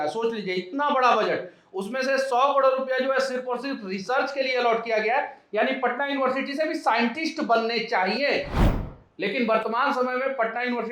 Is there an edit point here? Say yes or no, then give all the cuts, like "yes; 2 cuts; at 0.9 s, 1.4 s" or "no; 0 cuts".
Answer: no; 0 cuts